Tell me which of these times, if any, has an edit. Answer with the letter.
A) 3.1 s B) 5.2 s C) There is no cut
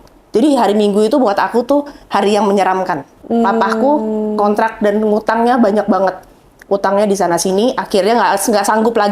A